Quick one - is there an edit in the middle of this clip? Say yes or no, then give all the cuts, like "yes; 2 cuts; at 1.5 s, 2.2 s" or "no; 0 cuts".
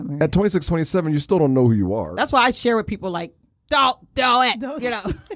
yes; 1 cut; at 2.1 s